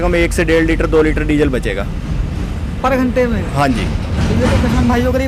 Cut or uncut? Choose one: uncut